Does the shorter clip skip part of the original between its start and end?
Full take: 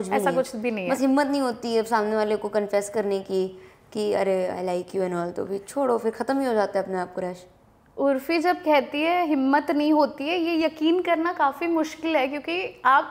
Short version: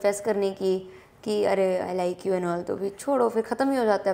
no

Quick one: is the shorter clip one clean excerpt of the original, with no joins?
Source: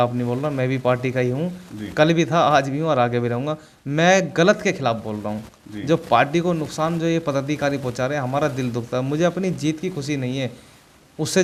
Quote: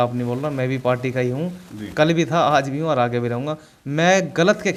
yes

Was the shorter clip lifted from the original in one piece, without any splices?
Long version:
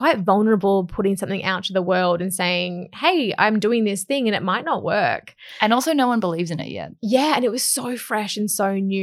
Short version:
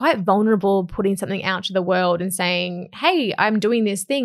yes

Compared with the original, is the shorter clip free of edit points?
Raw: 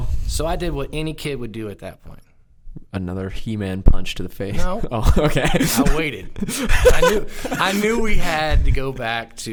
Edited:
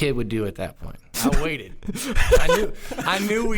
no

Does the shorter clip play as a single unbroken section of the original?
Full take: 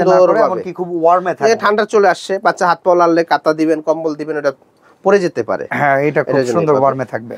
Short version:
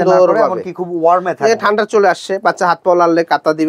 yes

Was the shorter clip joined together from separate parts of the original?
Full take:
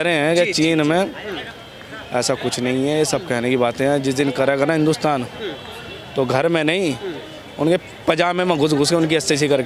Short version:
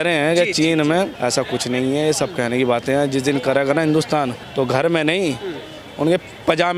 yes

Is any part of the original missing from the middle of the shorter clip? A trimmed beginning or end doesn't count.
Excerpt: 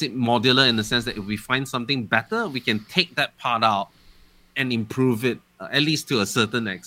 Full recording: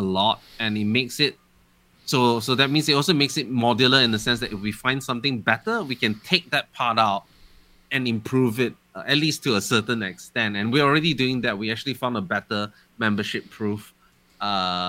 no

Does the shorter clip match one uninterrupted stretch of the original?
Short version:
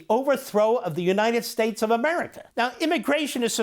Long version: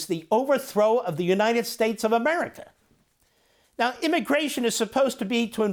no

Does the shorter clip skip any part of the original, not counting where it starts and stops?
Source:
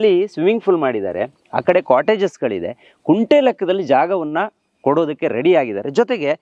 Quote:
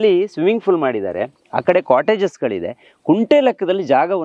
no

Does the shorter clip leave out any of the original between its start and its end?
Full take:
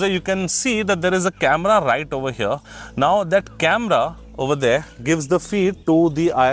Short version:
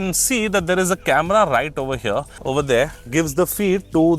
yes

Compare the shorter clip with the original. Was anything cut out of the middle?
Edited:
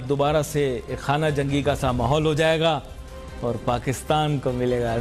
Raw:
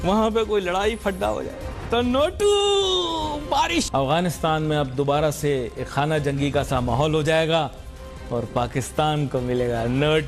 no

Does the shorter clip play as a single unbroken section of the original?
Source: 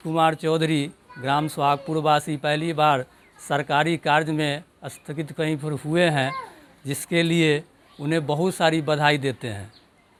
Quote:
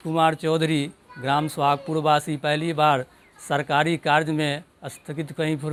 yes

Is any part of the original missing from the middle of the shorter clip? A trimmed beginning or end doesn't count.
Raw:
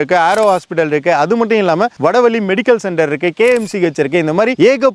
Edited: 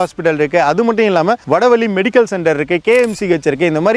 no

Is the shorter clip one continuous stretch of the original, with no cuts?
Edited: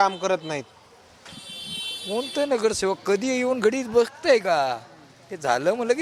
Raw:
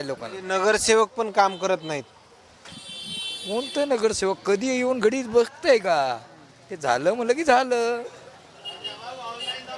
yes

